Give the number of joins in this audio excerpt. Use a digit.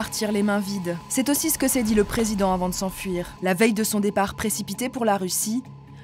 2